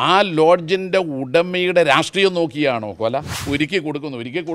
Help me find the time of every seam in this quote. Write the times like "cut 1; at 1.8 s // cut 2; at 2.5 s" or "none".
cut 1; at 3.4 s